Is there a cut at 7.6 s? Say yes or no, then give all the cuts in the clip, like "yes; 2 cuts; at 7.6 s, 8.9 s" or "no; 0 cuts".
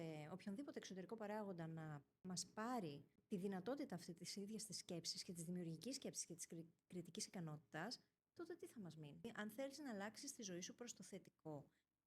no; 3 cuts; at 2.1 s, 3.1 s, 9.2 s